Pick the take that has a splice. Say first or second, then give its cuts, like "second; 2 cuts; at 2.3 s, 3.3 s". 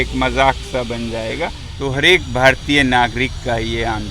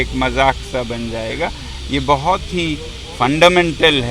first; 1 cut; at 1.6 s